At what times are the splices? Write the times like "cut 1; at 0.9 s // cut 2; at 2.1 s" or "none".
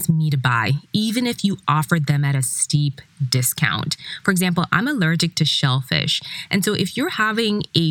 none